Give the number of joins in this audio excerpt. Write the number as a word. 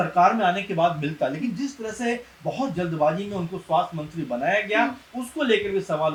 zero